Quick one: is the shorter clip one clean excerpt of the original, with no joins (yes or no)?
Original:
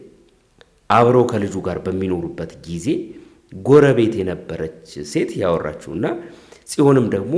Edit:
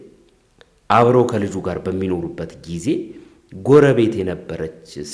yes